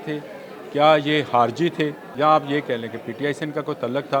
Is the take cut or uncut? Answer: cut